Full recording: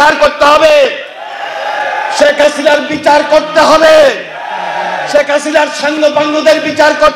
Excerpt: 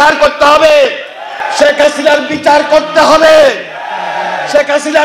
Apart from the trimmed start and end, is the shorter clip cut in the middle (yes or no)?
yes